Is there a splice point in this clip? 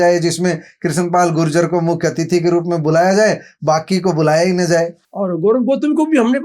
yes; 1 cut; at 5.0 s

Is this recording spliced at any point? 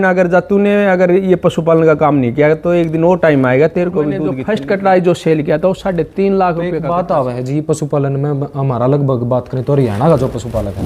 yes; 2 cuts; at 4.4 s, 6.8 s

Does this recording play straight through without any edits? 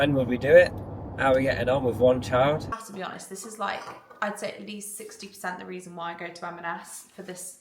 no; 1 cut; at 2.8 s

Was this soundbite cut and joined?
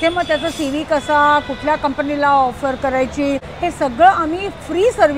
yes; 1 cut; at 3.5 s

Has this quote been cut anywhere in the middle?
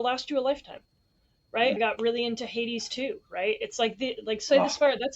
yes; 1 cut; at 1.8 s

